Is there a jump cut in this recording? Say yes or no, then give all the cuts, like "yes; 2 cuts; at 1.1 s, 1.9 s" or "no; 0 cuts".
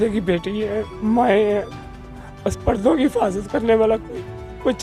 no; 0 cuts